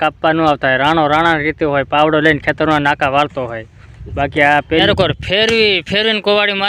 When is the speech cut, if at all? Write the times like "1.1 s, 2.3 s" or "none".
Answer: 4.8 s